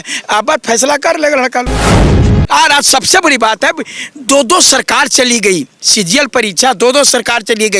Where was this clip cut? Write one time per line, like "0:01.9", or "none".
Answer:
0:02.2

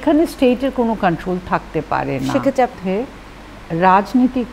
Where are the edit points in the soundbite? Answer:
0:02.8

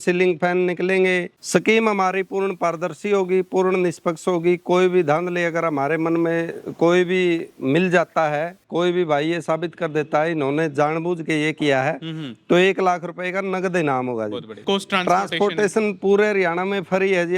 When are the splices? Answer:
0:01.4
0:14.5

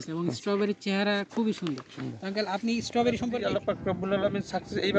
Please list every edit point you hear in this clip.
0:03.4

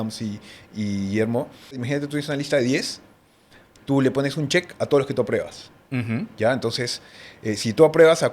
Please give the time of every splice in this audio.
0:01.8

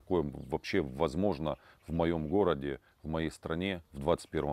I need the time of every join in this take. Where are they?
none

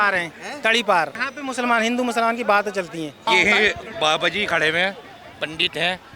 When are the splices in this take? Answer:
0:01.2
0:03.1

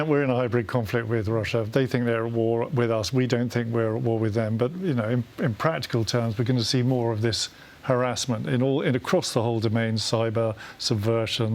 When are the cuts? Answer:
none

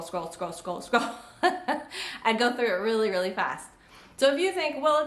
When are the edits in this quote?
none

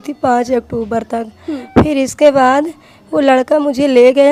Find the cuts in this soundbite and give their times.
none

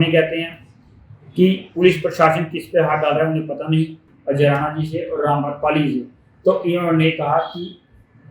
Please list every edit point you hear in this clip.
0:04.1

